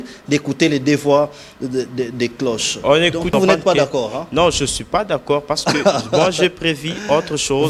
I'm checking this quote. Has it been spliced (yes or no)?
yes